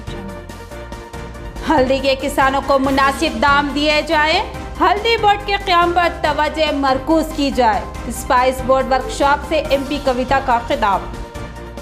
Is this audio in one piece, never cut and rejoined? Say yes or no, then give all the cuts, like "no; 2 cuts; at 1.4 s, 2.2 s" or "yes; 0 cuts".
no; 1 cut; at 1.4 s